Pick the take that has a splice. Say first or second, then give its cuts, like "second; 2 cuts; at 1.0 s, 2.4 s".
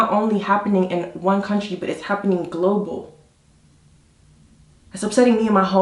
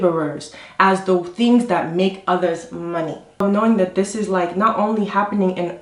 second; 1 cut; at 3.4 s